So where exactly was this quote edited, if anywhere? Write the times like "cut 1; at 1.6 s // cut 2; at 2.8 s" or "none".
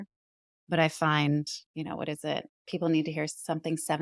cut 1; at 1.6 s